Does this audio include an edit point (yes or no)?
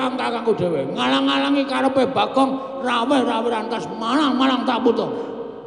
no